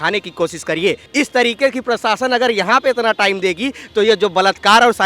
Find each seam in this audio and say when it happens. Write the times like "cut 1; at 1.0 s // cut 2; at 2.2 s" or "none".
cut 1; at 1.0 s